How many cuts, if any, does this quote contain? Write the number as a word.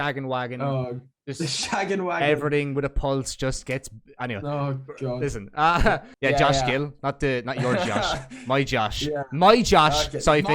one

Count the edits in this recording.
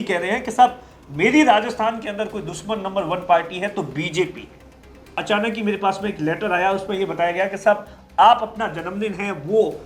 one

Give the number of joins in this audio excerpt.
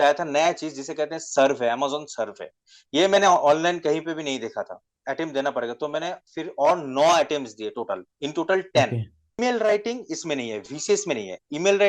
two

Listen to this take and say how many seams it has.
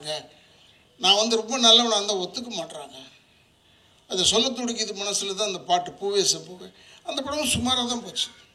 zero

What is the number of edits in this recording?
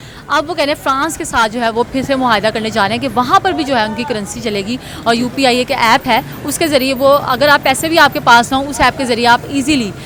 zero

